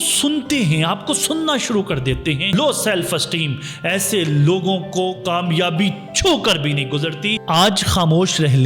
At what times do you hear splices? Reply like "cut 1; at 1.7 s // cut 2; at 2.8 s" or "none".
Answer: cut 1; at 2.5 s // cut 2; at 7.4 s